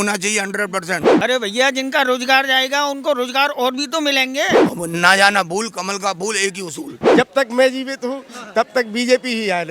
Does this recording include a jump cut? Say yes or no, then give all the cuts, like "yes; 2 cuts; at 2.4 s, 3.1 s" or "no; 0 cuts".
yes; 3 cuts; at 1.1 s, 4.6 s, 7.0 s